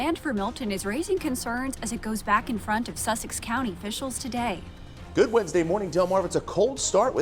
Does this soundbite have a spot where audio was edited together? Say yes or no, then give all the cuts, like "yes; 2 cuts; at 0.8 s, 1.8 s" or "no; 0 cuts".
no; 0 cuts